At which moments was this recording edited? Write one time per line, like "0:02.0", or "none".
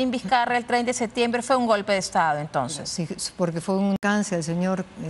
0:04.0

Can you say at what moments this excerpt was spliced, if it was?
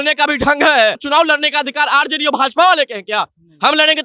0:01.0

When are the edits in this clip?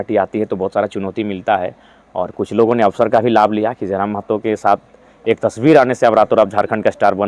none

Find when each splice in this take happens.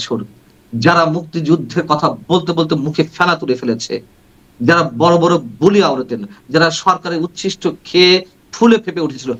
none

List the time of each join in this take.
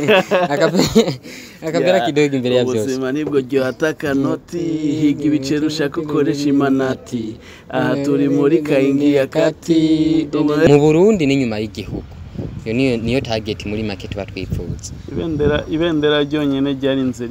0:10.7

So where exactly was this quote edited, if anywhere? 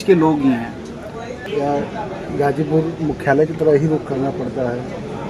0:01.4

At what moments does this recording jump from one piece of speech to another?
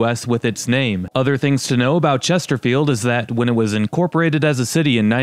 0:01.1

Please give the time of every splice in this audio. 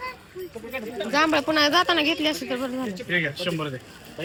none

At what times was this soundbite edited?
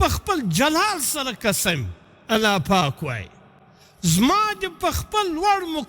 none

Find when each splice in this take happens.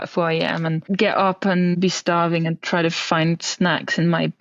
0:00.8
0:01.7

